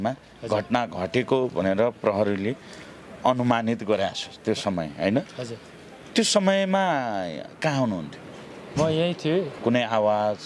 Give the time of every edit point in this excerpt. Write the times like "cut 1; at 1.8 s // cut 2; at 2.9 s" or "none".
cut 1; at 9.5 s